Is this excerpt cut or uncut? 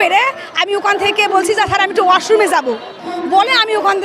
uncut